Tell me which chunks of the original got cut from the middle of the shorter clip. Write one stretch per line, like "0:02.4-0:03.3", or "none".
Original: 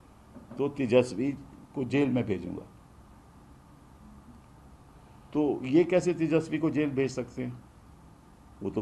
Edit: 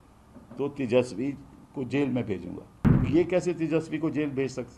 0:03.0-0:05.6